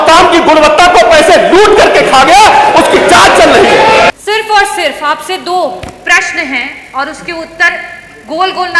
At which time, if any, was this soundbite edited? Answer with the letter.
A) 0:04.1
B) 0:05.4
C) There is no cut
A